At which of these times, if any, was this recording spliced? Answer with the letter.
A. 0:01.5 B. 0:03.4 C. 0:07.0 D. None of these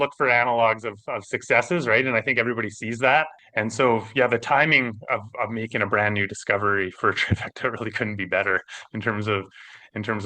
B